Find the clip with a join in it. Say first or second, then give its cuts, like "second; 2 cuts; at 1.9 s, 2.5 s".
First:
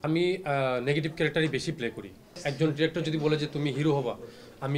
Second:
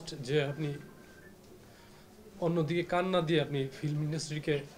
first; 1 cut; at 2.5 s